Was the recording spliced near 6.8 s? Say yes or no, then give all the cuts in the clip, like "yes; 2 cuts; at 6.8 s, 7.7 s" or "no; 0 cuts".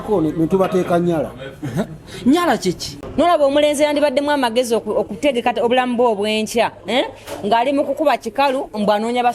no; 1 cut; at 2.9 s